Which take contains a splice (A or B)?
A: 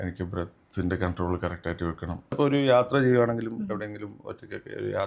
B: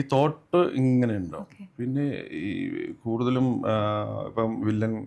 A